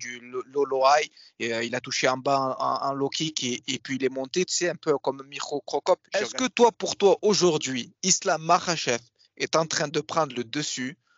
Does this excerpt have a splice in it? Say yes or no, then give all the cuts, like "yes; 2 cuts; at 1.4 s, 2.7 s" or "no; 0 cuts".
yes; 1 cut; at 6.3 s